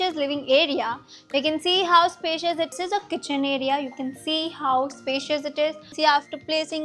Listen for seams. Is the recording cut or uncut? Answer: cut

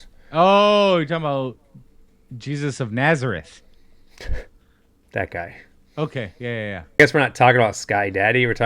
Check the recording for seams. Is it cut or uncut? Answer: cut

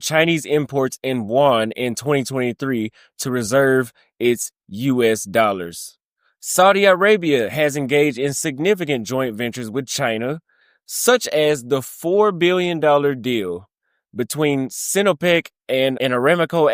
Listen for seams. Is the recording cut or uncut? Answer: uncut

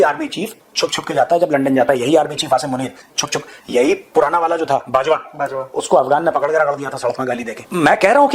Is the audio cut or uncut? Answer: uncut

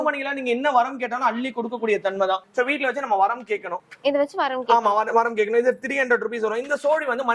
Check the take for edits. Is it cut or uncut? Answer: uncut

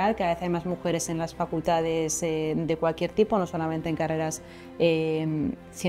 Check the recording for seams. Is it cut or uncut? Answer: uncut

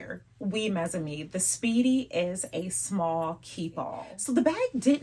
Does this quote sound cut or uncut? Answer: cut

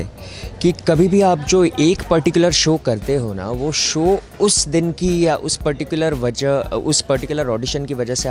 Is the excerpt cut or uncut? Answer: uncut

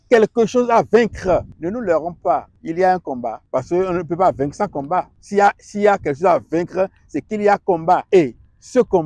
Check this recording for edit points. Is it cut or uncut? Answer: cut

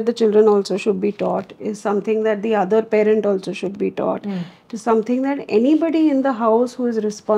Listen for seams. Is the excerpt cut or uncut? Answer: uncut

